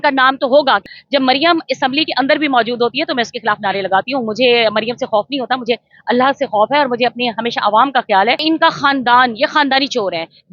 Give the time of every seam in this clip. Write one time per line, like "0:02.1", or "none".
0:00.9
0:08.4

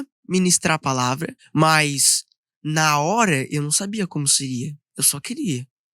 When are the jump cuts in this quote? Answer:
0:01.4

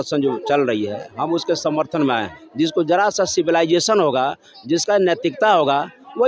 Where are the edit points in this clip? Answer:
0:02.4

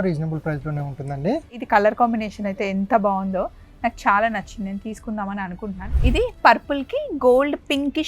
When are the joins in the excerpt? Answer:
0:01.5
0:05.8

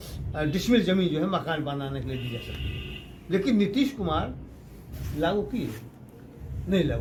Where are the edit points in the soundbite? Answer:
none

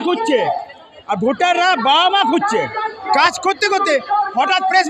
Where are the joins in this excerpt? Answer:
0:03.1

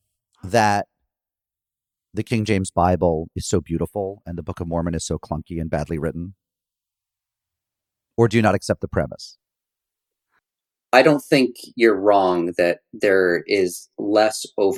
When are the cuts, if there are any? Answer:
none

